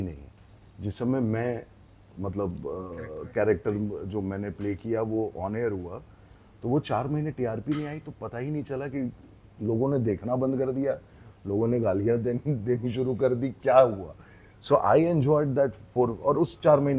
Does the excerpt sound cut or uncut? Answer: uncut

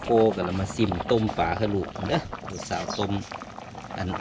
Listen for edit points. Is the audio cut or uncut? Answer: uncut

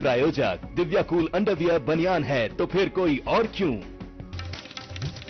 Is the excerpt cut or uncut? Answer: cut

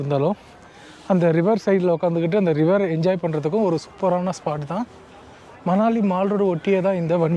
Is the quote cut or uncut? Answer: uncut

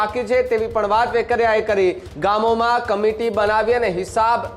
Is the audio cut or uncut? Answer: cut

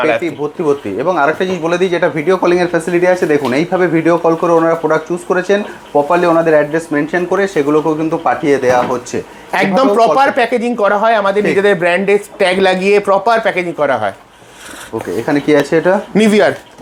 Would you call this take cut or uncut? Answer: uncut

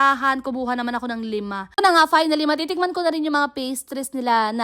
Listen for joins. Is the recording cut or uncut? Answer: cut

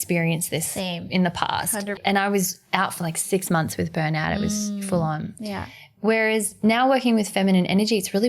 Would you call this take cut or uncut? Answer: cut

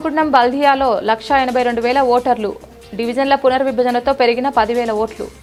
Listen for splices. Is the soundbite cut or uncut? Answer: uncut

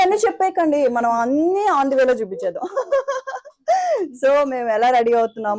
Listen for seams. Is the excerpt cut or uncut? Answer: uncut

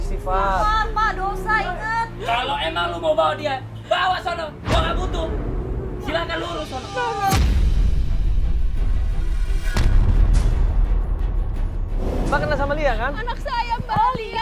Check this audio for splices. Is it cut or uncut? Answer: cut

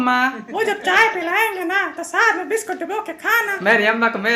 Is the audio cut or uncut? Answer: uncut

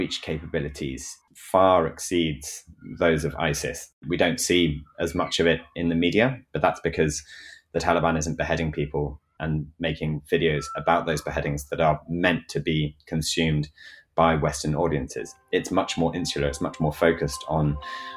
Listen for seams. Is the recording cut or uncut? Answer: cut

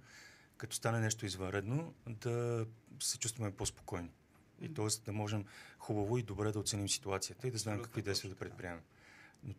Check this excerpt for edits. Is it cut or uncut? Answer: uncut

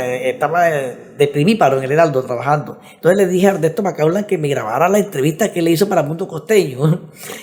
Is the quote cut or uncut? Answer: uncut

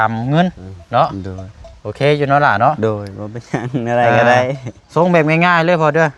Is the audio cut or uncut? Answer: uncut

